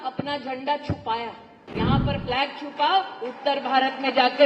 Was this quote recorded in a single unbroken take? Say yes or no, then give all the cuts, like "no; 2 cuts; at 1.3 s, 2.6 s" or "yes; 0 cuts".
no; 1 cut; at 1.6 s